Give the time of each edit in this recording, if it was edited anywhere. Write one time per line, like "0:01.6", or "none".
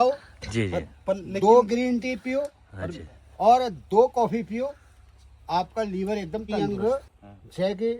0:06.5